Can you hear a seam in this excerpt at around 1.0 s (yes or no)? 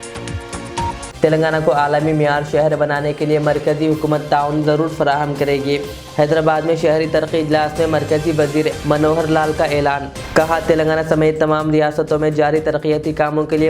yes